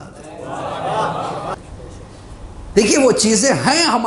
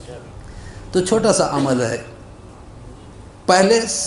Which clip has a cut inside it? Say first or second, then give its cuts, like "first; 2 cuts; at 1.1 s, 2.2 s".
first; 1 cut; at 1.5 s